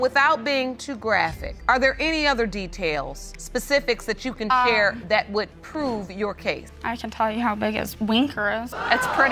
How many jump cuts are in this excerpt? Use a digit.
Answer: 0